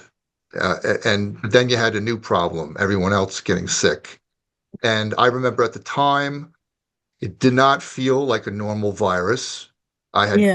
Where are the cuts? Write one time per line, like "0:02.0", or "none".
none